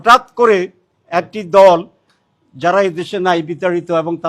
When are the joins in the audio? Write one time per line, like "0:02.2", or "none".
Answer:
none